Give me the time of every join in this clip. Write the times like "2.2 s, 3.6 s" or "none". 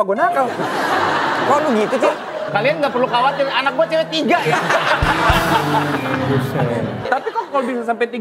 2.2 s, 7.1 s